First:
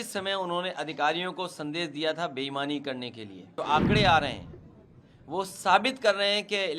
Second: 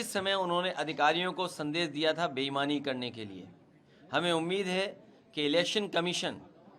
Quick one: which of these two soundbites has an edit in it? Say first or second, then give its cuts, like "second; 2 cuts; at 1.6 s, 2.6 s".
first; 1 cut; at 3.6 s